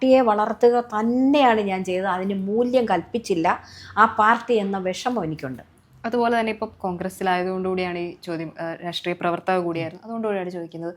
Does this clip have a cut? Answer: no; 0 cuts

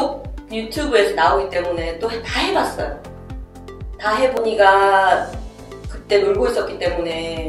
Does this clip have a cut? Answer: yes; 1 cut; at 4.4 s

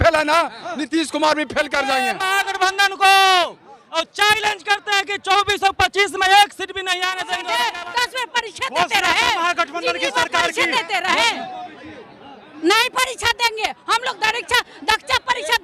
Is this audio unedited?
no; 2 cuts; at 2.2 s, 7.3 s

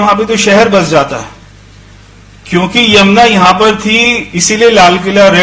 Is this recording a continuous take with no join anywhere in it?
yes; 0 cuts

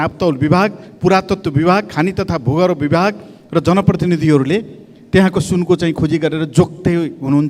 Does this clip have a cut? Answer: no; 0 cuts

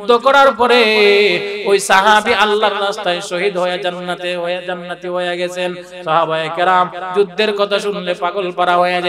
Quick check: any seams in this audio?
no; 0 cuts

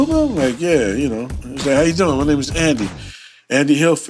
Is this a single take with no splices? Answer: yes; 0 cuts

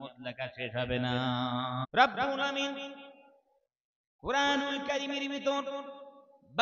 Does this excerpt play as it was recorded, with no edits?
no; 1 cut; at 1.8 s

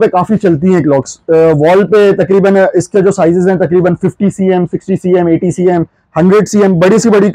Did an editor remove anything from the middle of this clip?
no; 0 cuts

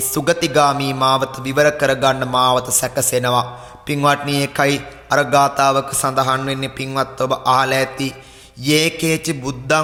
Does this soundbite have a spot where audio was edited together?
no; 0 cuts

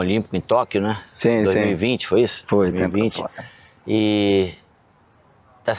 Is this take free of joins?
yes; 0 cuts

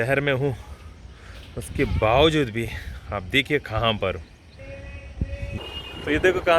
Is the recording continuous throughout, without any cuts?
no; 1 cut; at 5.5 s

